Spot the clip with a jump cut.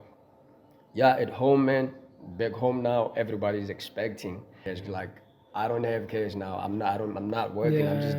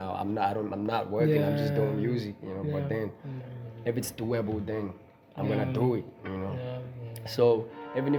first; 1 cut; at 4.6 s

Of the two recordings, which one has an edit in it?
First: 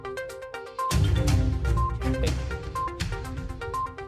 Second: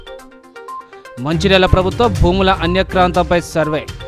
first; 1 cut; at 0.9 s

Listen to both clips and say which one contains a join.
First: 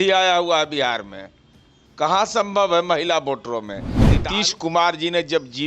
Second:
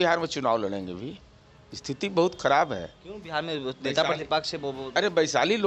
first; 1 cut; at 4.2 s

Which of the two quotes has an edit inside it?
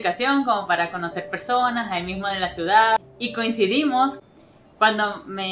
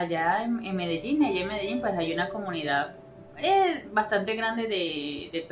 first; 2 cuts; at 3.1 s, 4.2 s

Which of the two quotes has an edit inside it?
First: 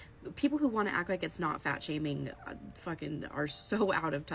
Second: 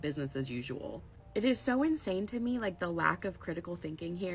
second; 1 cut; at 1.8 s

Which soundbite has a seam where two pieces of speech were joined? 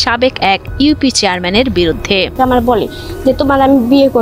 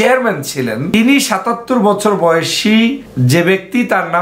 second; 2 cuts; at 0.9 s, 3.1 s

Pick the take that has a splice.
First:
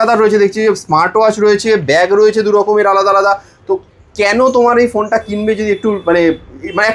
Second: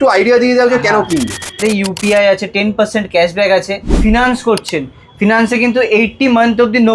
second; 2 cuts; at 1.6 s, 4.0 s

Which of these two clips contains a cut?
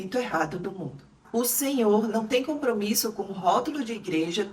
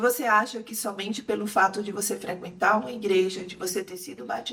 first; 1 cut; at 1.1 s

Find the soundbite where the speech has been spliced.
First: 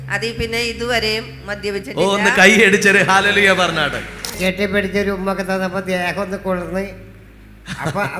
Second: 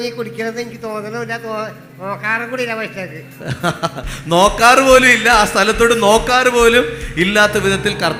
first; 1 cut; at 4.3 s

